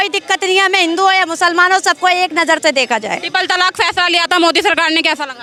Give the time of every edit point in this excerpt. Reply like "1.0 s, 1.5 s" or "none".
none

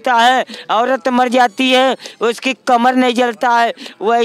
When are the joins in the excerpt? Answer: none

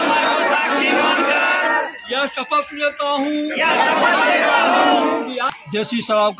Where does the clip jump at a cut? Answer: 5.4 s

